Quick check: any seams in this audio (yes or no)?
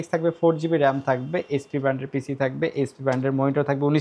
no